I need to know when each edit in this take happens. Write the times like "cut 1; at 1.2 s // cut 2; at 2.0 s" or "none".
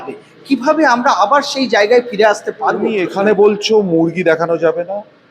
cut 1; at 2.8 s